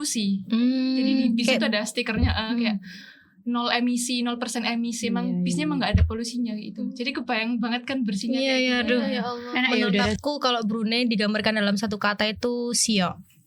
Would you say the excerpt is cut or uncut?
cut